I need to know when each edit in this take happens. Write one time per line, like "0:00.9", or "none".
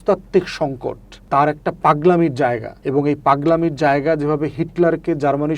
0:01.1
0:02.7